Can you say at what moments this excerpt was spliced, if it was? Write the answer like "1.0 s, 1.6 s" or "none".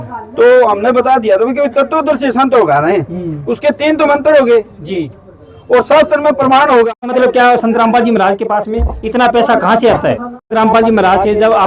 7.1 s, 10.5 s